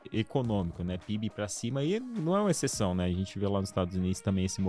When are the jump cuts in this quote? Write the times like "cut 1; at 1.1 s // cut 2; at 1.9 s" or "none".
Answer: none